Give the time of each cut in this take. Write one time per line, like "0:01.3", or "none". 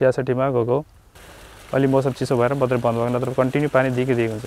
0:01.2